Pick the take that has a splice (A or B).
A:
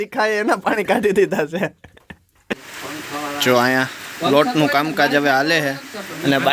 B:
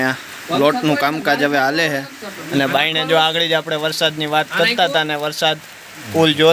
A